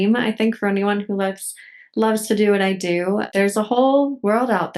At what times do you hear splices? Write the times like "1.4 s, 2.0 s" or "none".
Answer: 3.3 s